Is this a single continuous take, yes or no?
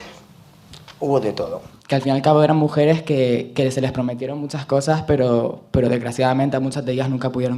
no